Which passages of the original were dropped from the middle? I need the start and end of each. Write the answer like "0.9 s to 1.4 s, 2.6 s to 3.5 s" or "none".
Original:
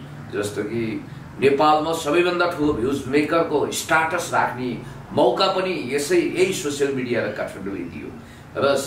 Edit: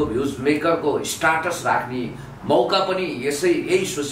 none

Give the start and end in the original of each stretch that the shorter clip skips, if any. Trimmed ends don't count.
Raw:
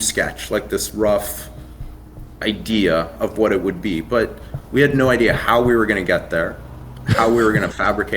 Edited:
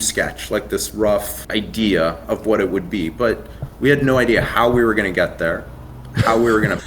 1.4 s to 2.3 s

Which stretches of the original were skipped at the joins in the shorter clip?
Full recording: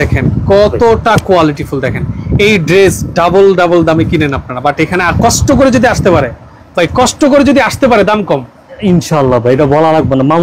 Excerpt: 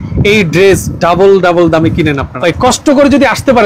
4.4 s to 6.6 s

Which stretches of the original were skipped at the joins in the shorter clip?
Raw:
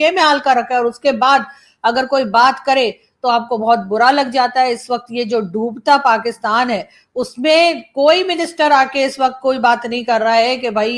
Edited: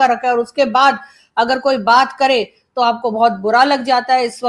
none

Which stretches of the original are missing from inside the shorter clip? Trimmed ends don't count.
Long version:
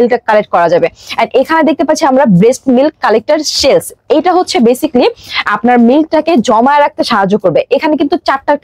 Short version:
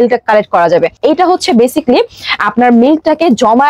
0.9 s to 4.0 s

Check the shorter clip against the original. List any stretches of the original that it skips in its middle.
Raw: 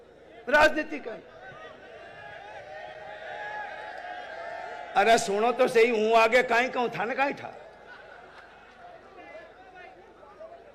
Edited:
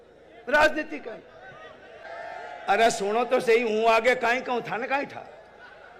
2.0 s to 4.3 s

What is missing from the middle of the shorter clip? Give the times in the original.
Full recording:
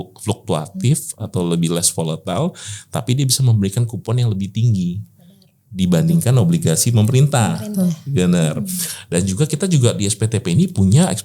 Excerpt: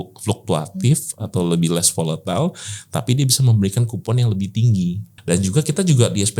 5.1 s to 8.9 s

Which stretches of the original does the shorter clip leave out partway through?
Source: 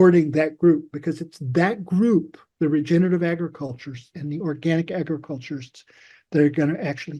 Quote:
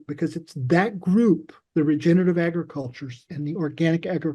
none

